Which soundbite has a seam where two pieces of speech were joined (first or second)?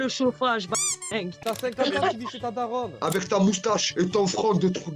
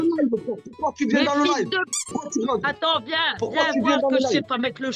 first